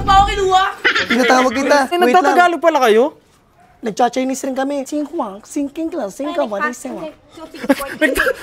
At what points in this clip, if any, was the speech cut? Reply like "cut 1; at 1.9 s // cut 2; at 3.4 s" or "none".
cut 1; at 1.9 s // cut 2; at 4.9 s